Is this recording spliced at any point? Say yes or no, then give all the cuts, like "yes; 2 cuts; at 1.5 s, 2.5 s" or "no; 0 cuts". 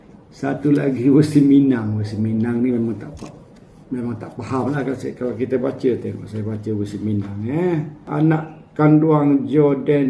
yes; 1 cut; at 8.1 s